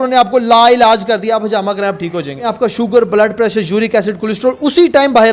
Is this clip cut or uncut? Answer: cut